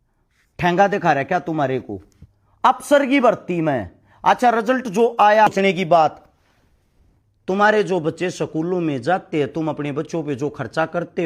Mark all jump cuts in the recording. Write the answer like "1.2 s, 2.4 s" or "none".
5.5 s